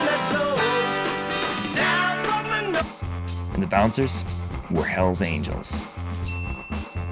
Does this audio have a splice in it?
no; 0 cuts

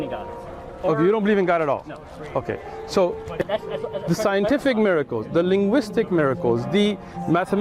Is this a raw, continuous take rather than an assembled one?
no; 1 cut; at 3.5 s

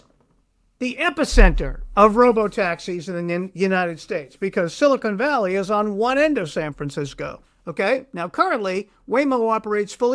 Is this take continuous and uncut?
yes; 0 cuts

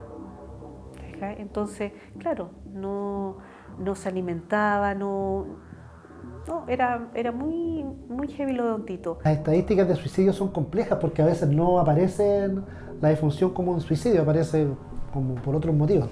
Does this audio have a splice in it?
yes; 1 cut; at 9.1 s

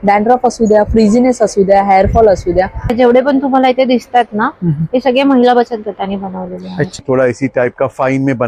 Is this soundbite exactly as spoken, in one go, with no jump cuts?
no; 2 cuts; at 2.9 s, 7.0 s

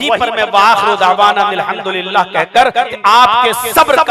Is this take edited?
yes; 1 cut; at 2.9 s

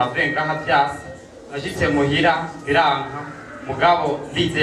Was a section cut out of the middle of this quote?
no; 0 cuts

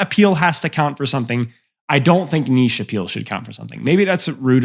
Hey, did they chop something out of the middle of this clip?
no; 0 cuts

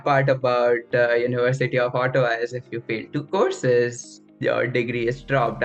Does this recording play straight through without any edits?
yes; 0 cuts

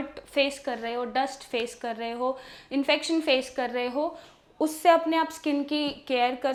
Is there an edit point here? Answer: no; 0 cuts

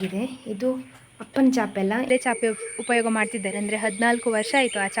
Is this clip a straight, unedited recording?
no; 1 cut; at 2.1 s

